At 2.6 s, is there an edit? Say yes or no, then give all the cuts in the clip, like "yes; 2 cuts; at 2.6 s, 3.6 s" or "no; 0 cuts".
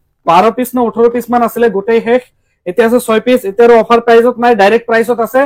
no; 0 cuts